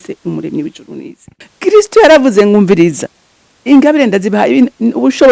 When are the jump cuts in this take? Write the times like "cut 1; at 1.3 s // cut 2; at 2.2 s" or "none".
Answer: cut 1; at 1.4 s